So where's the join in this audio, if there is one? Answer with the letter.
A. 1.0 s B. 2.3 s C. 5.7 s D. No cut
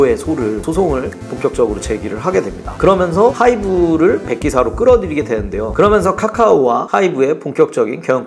D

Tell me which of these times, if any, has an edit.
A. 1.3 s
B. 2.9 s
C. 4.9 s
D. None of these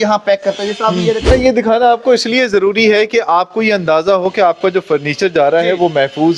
A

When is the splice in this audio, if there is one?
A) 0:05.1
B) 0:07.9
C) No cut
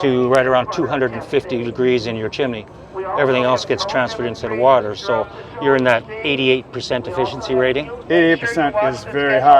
B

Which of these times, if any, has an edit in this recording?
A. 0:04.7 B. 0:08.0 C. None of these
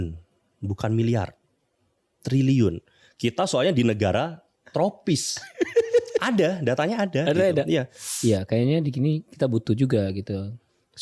B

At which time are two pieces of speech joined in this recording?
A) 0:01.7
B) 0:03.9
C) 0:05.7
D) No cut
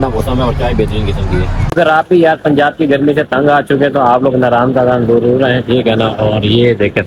A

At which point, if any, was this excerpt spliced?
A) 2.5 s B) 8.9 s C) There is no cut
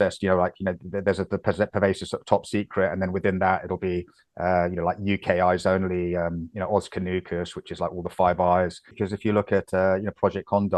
B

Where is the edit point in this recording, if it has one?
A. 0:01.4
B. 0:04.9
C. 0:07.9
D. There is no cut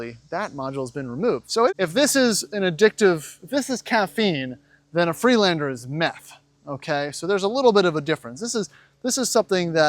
A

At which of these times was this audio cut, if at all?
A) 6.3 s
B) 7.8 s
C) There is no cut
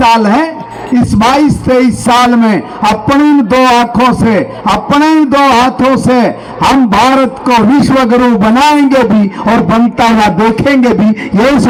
C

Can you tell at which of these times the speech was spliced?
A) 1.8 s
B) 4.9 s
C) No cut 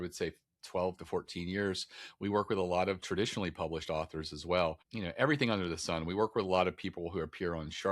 B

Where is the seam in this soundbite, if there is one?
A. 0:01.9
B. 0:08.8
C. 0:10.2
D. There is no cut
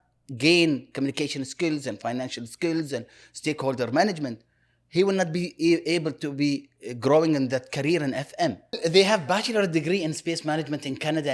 B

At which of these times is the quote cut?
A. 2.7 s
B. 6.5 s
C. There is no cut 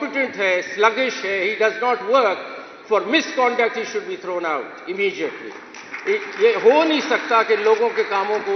C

